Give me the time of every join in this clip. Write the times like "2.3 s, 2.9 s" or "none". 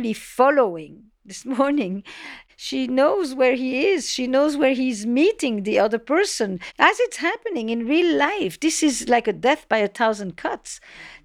2.3 s, 6.7 s